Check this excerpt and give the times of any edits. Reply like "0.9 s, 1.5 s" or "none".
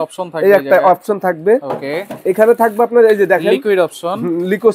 none